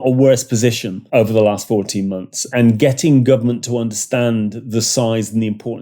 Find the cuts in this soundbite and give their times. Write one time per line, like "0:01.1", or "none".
0:00.9
0:02.5